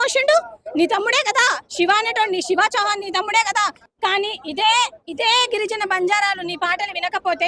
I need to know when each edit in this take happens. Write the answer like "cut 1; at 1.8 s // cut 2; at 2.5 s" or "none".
cut 1; at 3.8 s